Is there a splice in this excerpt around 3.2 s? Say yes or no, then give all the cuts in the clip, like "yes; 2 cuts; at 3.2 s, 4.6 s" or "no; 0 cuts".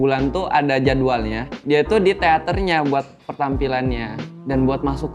no; 1 cut; at 1.5 s